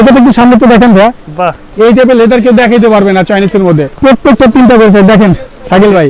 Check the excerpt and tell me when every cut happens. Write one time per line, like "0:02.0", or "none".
0:01.6
0:03.9